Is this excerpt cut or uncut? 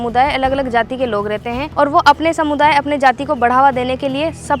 cut